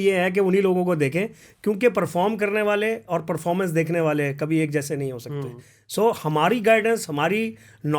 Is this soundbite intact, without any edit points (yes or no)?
yes